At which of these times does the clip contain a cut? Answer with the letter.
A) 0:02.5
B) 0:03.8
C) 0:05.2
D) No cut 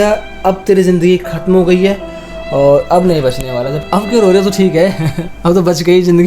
B